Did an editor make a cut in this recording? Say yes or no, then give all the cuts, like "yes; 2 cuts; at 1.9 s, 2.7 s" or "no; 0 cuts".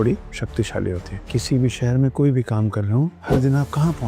yes; 2 cuts; at 1.2 s, 3.2 s